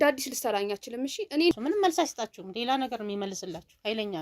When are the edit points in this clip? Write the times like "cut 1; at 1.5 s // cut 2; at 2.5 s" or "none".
cut 1; at 1.5 s

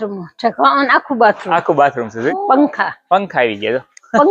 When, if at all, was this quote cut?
cut 1; at 2.3 s

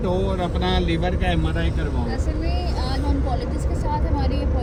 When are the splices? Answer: none

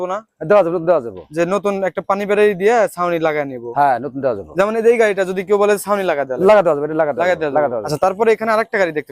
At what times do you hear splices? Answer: cut 1; at 7.8 s

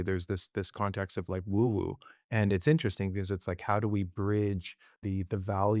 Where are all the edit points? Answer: none

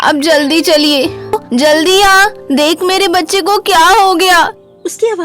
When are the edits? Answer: cut 1; at 1.3 s

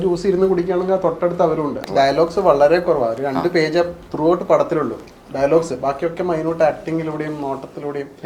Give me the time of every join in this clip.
cut 1; at 1.9 s

